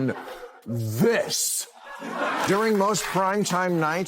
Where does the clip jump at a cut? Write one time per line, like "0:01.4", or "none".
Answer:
0:01.9